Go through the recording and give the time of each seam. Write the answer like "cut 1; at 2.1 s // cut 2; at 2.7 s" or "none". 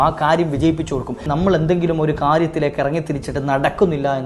cut 1; at 1.2 s